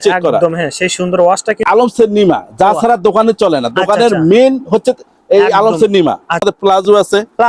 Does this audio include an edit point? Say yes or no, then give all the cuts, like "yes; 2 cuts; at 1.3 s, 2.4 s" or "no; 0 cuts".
yes; 2 cuts; at 1.6 s, 6.4 s